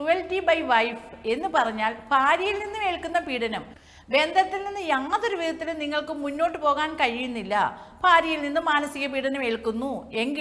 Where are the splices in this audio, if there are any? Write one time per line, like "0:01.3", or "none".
0:03.8